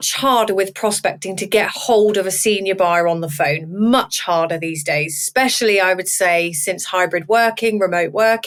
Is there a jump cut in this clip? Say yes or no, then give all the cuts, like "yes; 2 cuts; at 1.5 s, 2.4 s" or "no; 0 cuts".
no; 0 cuts